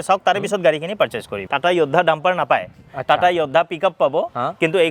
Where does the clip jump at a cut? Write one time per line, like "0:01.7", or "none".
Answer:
0:01.4